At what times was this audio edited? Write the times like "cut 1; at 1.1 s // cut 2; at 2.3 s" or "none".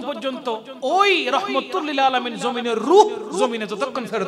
none